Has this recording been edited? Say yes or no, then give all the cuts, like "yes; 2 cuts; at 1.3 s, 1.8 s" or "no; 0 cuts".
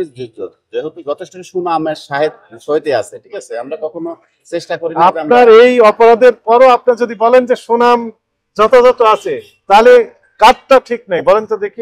no; 0 cuts